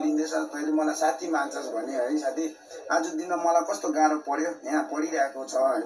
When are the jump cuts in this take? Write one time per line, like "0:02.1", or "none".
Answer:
none